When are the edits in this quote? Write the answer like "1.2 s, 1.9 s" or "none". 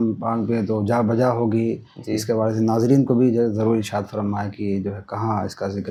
none